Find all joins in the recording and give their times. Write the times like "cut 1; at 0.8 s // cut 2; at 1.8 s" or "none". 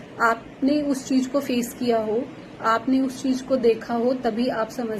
none